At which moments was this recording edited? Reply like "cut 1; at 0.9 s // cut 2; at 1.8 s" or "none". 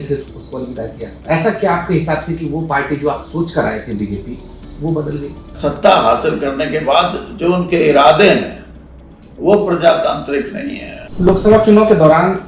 cut 1; at 5.7 s // cut 2; at 11.3 s